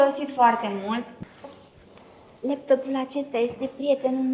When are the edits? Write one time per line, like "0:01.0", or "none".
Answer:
0:01.1